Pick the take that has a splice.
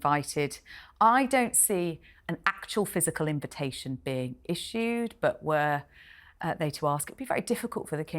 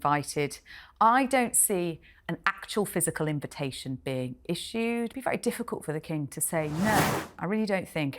second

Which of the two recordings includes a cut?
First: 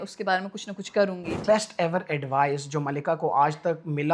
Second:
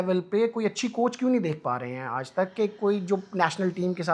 first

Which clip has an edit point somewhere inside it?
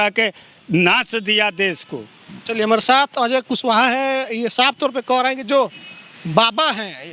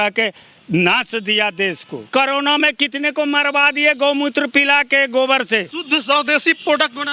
second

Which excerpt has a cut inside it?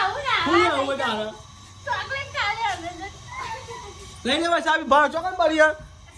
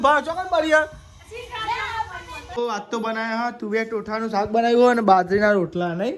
second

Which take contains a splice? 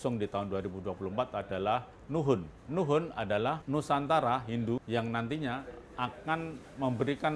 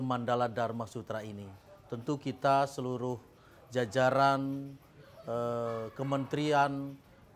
first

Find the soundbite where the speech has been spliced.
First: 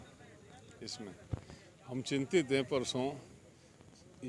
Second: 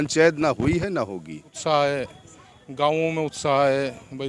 second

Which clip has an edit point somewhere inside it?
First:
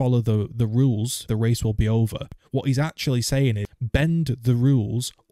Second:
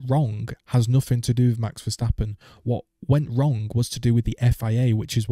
first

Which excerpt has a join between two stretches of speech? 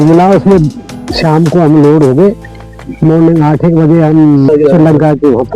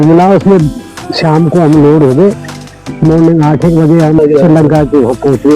second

